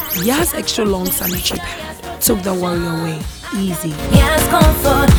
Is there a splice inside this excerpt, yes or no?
no